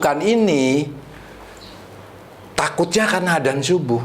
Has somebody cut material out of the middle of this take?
no; 0 cuts

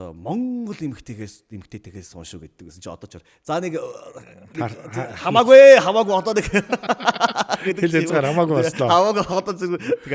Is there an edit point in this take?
no; 0 cuts

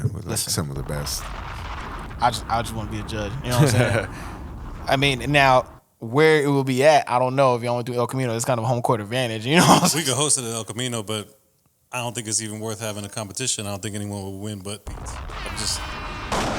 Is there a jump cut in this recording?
yes; 1 cut; at 1.9 s

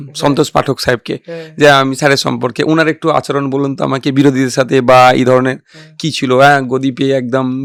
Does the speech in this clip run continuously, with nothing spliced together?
yes; 0 cuts

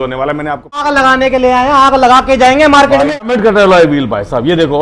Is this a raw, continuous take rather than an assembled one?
no; 2 cuts; at 0.8 s, 3.2 s

